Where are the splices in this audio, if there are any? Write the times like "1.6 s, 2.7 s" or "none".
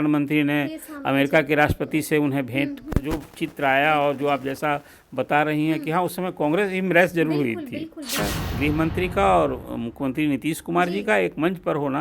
8.2 s